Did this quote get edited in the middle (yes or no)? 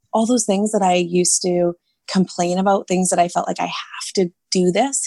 no